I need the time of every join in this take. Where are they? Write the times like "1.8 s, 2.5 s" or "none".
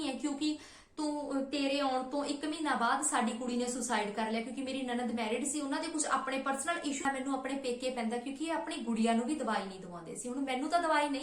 7.0 s